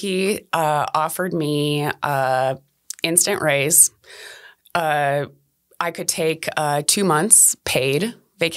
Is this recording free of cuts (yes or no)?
yes